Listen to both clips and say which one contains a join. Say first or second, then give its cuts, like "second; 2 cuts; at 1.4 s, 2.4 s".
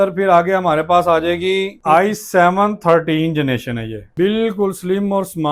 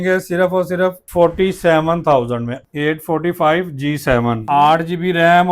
second; 3 cuts; at 1.0 s, 2.6 s, 4.4 s